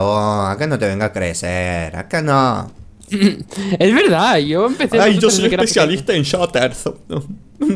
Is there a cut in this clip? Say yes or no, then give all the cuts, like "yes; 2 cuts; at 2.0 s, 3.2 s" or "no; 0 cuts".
no; 0 cuts